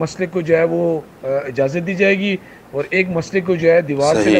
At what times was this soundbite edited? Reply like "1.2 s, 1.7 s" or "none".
none